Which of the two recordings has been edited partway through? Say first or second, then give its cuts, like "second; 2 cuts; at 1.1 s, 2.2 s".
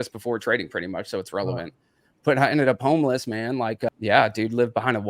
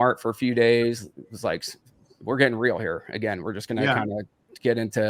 first; 1 cut; at 3.9 s